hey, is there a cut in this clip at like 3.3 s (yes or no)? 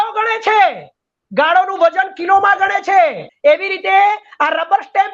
yes